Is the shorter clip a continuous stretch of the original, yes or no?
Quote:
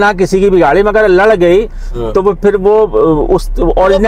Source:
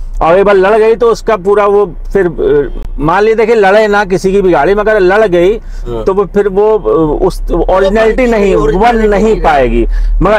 yes